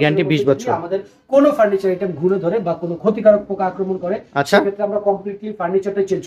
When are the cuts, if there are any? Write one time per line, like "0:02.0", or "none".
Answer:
none